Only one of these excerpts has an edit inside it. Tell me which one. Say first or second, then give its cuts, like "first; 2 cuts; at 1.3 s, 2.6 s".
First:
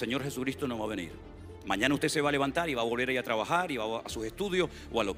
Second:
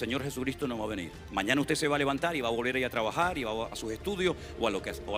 second; 1 cut; at 1.1 s